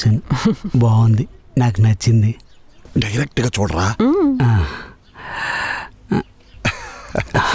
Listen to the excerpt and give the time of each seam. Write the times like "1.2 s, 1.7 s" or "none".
none